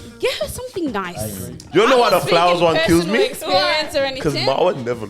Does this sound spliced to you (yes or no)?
yes